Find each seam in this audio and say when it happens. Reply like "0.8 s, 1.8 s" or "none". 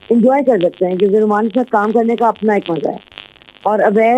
none